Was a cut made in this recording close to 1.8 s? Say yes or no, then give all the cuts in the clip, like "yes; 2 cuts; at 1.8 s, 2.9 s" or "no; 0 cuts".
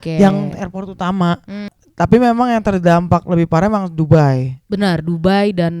yes; 1 cut; at 1.8 s